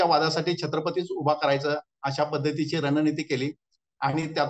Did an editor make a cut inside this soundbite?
no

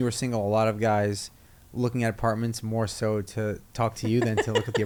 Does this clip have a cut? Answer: no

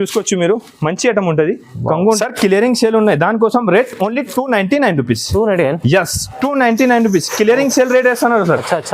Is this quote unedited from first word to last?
no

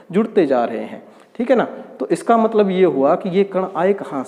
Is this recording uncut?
yes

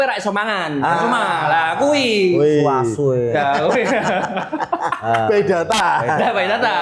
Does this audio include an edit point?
no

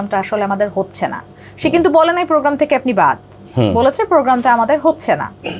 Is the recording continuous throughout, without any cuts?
yes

